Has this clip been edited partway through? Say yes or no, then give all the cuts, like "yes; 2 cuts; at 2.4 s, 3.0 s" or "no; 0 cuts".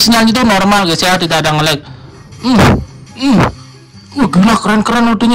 no; 0 cuts